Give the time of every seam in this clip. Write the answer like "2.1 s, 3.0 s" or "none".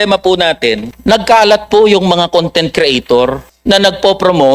0.9 s, 3.5 s